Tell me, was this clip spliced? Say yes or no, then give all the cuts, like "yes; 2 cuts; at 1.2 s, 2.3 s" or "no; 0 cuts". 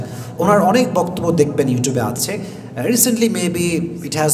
no; 0 cuts